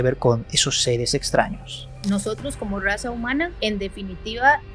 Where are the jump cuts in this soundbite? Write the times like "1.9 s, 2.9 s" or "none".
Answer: 1.9 s, 3.5 s